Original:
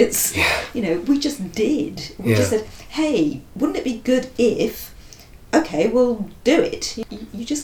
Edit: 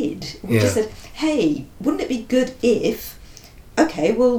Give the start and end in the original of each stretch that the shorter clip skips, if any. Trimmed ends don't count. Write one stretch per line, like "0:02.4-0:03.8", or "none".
none